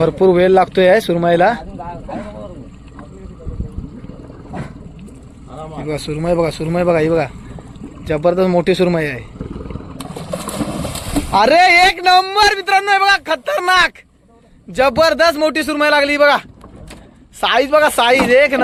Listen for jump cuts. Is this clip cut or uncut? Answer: uncut